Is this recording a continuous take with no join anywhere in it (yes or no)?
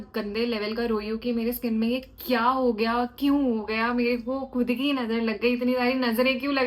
yes